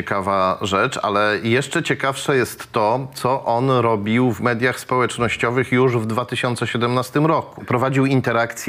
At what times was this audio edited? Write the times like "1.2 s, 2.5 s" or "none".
7.7 s